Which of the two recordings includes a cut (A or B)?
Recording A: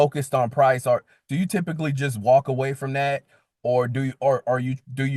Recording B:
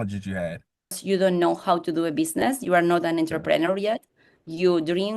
B